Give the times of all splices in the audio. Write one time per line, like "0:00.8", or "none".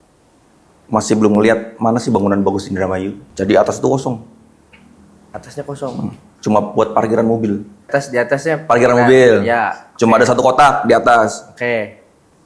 0:03.2
0:07.9